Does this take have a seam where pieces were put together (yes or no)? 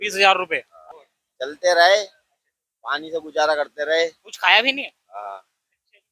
yes